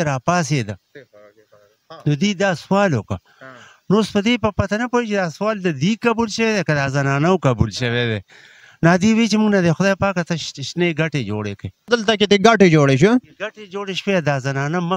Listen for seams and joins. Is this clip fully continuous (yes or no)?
no